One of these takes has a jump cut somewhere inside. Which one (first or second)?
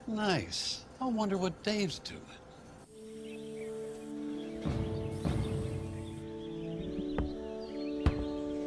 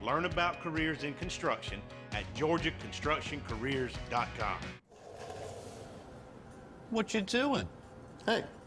second